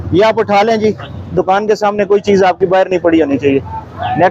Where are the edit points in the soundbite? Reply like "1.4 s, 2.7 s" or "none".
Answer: none